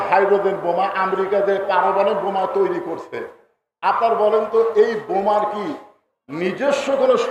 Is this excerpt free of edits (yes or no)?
yes